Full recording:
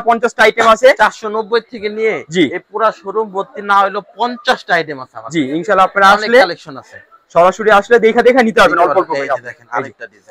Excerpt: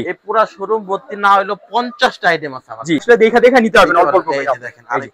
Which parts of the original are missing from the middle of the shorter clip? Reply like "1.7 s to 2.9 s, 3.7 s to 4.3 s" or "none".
5.5 s to 7.8 s